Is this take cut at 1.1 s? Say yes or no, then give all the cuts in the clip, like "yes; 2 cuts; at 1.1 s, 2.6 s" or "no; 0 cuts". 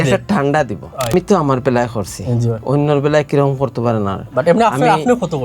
yes; 1 cut; at 1.1 s